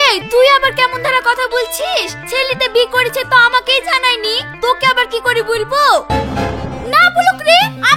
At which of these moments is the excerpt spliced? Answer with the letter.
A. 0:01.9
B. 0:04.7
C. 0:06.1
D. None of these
C